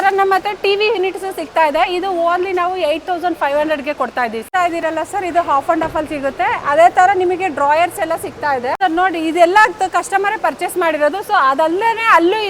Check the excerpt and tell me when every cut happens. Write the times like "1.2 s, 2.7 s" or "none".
4.4 s, 8.7 s